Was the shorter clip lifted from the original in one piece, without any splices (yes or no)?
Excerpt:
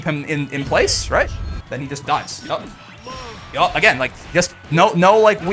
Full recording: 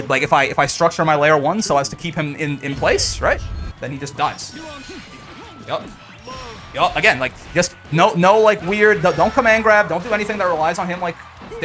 no